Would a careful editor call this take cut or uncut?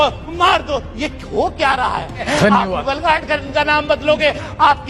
cut